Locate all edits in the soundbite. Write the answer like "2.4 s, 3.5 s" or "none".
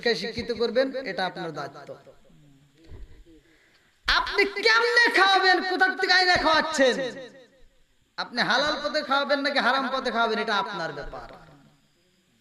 none

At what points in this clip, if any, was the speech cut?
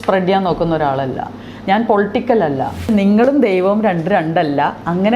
2.9 s

